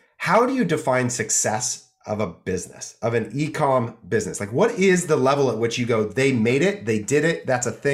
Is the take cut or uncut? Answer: uncut